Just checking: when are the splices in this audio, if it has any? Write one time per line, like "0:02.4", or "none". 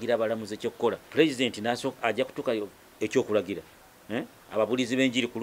0:01.0